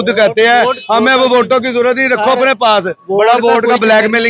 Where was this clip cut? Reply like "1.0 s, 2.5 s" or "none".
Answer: none